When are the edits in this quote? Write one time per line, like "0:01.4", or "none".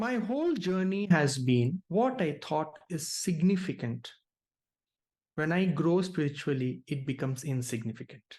0:01.8